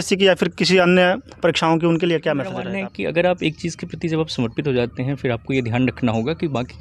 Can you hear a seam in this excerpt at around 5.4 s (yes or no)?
no